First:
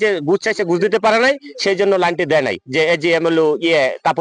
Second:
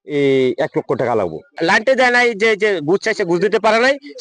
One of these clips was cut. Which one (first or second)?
second